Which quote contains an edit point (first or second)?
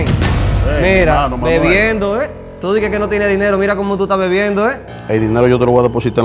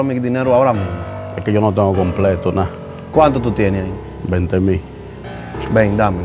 first